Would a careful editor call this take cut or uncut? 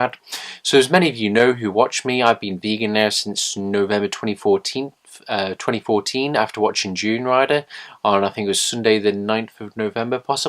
cut